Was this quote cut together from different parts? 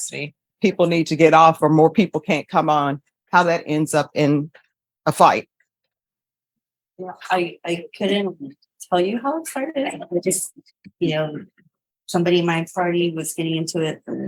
no; 0 cuts

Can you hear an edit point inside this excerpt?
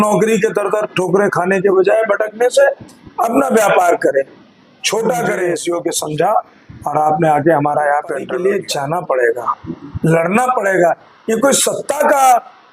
yes; 2 cuts; at 5.5 s, 8.4 s

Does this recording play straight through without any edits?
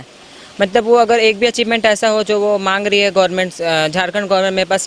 yes; 0 cuts

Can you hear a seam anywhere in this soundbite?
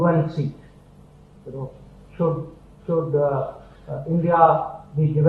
no; 0 cuts

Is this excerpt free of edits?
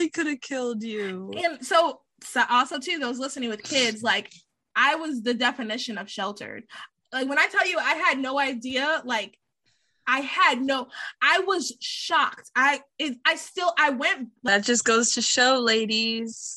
no; 1 cut; at 14.3 s

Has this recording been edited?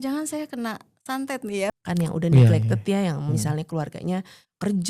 yes; 1 cut; at 1.7 s

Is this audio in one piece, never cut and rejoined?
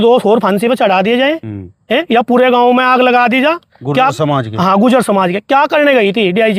yes; 0 cuts

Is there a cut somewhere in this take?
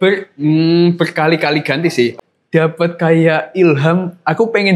yes; 1 cut; at 2.2 s

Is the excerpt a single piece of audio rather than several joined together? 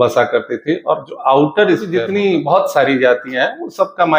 no; 1 cut; at 2.0 s

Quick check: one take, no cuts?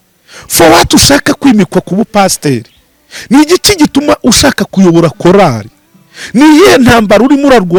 yes; 0 cuts

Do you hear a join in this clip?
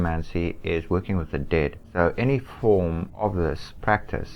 yes; 2 cuts; at 1.8 s, 3.2 s

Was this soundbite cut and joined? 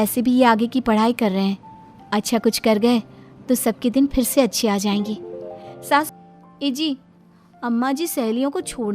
yes; 1 cut; at 6.1 s

